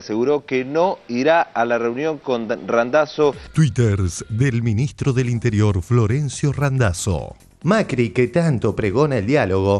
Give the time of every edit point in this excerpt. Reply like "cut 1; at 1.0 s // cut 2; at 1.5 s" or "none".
cut 1; at 3.4 s